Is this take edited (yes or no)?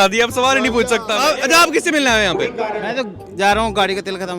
yes